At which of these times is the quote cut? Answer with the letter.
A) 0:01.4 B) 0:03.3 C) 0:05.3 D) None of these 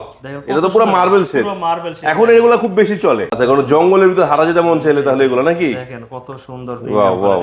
B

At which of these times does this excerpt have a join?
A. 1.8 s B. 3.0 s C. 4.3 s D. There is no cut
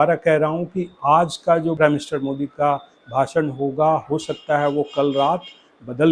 A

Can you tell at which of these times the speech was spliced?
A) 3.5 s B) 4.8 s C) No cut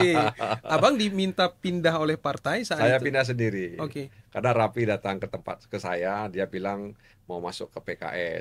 C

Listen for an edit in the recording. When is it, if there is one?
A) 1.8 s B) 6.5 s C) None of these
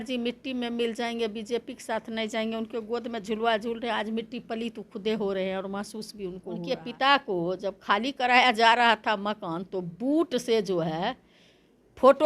B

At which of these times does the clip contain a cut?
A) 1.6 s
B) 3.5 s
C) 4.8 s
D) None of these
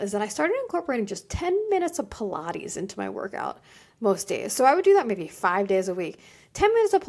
D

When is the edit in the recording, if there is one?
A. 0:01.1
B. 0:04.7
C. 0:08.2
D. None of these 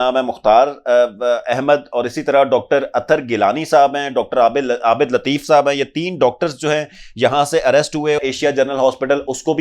C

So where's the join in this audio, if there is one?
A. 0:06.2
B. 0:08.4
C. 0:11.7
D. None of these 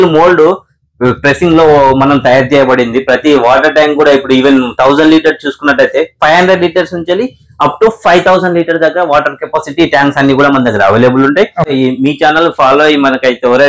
C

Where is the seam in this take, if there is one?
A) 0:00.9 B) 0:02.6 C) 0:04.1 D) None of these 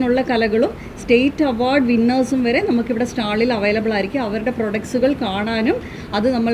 D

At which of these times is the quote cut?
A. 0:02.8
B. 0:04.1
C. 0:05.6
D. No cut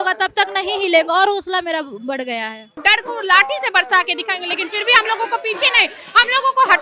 A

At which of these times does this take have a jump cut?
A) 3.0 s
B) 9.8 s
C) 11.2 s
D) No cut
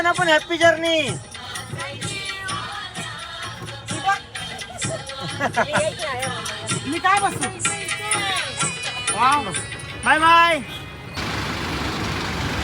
C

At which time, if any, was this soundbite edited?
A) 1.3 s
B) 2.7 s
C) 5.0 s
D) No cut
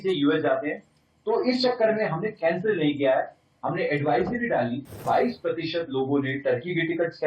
C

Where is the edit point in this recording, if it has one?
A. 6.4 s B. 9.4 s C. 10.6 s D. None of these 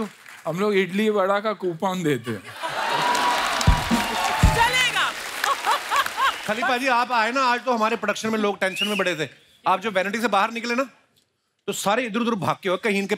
A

